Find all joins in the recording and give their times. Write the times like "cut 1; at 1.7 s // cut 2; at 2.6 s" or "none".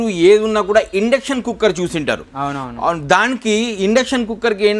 none